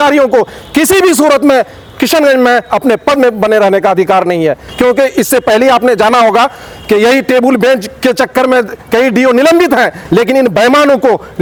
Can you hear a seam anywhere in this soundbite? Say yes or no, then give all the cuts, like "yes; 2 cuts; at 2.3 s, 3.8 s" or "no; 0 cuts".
no; 0 cuts